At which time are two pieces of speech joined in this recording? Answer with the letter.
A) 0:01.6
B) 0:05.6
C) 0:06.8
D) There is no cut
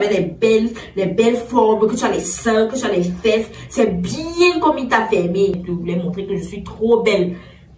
B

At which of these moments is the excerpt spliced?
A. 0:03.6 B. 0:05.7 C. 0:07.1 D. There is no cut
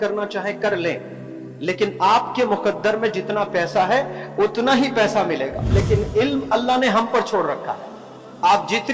B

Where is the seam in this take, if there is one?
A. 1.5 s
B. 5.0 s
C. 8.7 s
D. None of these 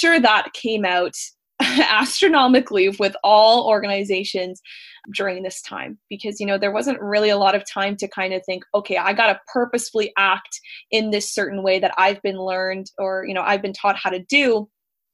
B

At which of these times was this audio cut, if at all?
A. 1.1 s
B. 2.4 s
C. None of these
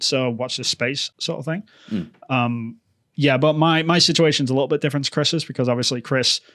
C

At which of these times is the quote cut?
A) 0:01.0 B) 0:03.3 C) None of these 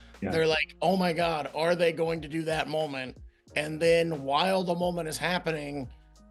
C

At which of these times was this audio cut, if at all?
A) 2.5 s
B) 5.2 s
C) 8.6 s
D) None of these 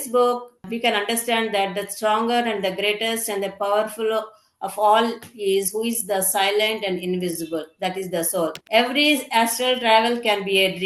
C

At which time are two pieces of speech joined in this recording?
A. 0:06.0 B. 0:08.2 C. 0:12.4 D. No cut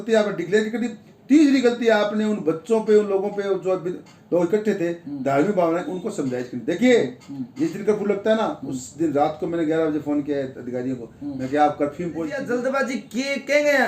C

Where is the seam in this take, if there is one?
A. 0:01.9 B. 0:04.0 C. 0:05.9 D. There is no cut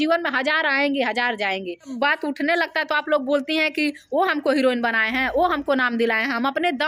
A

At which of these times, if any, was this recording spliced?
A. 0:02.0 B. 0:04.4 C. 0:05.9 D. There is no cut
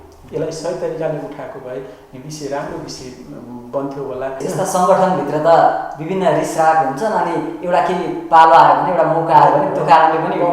B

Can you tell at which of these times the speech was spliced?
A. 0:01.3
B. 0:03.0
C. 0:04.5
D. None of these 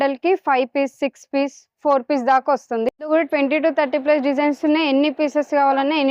B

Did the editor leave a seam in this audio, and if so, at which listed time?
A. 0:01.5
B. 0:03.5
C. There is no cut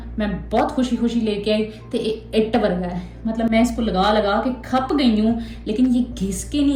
C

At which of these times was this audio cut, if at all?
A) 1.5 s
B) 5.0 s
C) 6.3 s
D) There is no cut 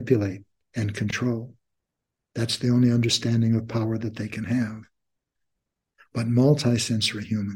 D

